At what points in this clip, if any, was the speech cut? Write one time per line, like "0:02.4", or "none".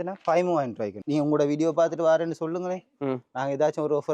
0:01.0